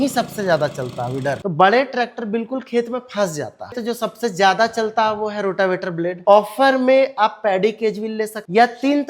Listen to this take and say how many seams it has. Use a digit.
3